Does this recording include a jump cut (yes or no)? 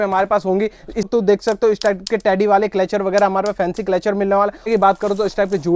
yes